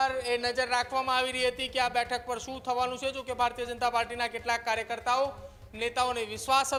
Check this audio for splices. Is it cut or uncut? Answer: uncut